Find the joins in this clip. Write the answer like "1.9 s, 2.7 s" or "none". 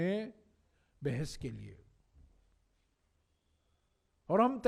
none